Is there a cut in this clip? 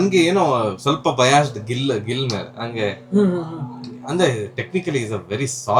no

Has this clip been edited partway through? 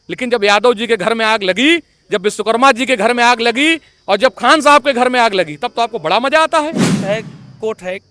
yes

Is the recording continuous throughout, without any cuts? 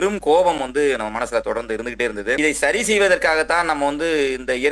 no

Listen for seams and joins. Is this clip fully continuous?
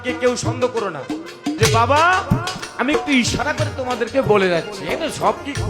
no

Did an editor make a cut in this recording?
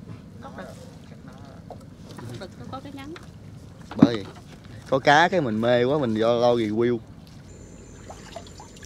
yes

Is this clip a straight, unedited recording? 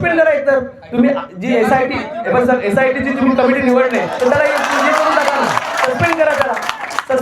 yes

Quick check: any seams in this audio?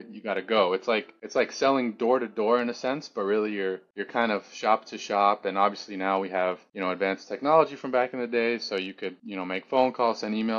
no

